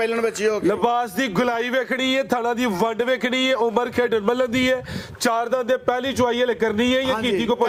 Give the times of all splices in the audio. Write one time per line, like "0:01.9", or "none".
none